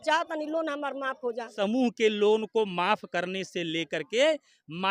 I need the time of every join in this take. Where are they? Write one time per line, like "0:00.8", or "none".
0:01.5